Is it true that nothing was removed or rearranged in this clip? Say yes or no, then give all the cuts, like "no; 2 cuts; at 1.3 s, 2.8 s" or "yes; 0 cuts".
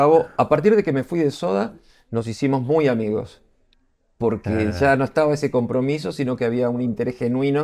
yes; 0 cuts